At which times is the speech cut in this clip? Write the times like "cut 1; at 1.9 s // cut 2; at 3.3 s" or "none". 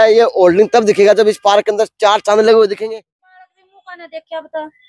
cut 1; at 2.9 s